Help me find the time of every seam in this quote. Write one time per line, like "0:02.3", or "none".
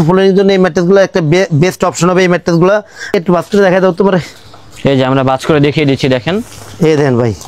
0:03.1